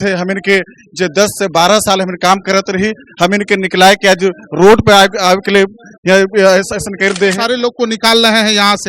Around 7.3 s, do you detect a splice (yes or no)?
yes